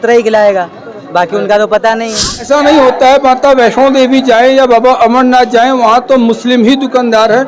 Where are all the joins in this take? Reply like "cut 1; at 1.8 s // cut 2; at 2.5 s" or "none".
cut 1; at 1.8 s